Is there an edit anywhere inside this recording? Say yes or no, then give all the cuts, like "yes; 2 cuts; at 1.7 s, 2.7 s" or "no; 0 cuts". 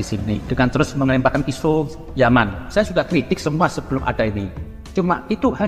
yes; 1 cut; at 2.6 s